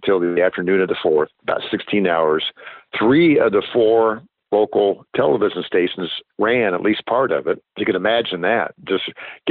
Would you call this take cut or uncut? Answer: cut